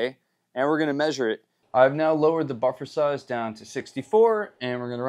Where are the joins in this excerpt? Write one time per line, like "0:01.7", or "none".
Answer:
0:01.5

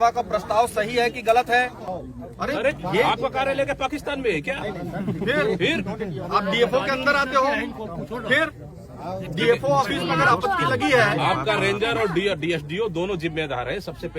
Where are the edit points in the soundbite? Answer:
0:01.8

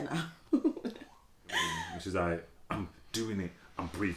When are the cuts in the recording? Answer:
0:01.8

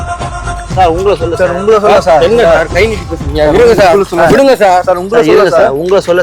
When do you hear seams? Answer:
none

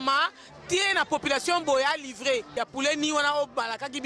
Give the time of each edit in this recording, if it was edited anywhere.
0:02.5

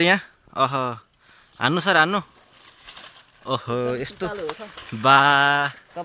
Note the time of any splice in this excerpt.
none

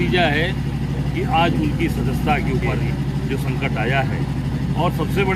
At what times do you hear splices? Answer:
0:02.8

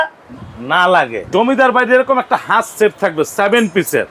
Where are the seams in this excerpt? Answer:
0:01.2

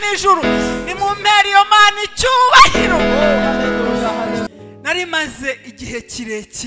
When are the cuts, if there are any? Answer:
0:04.5

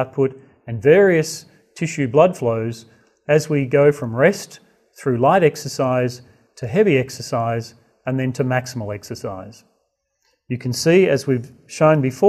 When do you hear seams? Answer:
0:08.8

